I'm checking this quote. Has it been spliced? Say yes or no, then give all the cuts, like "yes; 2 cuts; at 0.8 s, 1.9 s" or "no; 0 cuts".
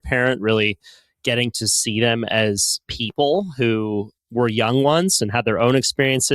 yes; 1 cut; at 4.1 s